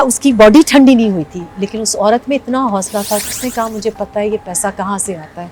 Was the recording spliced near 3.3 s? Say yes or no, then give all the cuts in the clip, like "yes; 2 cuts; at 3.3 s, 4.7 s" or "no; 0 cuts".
yes; 1 cut; at 3.3 s